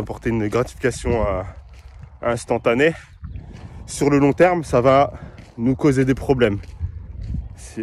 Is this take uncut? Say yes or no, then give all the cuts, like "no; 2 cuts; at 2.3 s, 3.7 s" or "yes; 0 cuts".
yes; 0 cuts